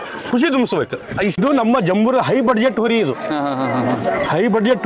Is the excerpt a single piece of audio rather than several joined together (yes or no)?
no